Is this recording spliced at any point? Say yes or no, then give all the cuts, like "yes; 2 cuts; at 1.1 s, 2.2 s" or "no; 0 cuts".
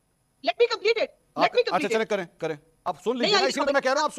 yes; 1 cut; at 2.8 s